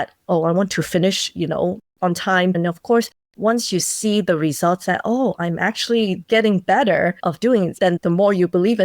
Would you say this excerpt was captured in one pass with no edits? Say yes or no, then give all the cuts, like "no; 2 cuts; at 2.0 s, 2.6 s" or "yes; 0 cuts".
no; 2 cuts; at 2.6 s, 7.9 s